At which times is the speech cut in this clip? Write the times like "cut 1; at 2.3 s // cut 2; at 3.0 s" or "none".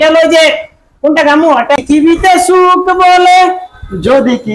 cut 1; at 1.8 s